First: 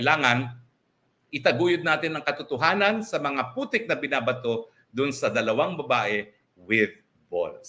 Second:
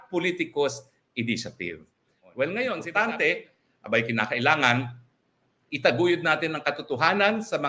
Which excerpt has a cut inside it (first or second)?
second